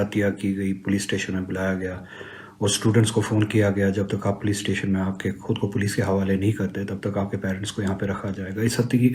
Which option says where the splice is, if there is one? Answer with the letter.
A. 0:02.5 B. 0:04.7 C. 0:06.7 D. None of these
D